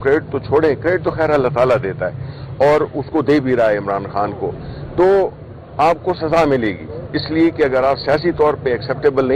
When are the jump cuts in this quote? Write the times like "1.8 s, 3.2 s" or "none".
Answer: none